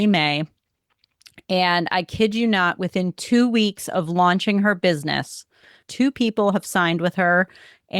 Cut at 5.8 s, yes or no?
yes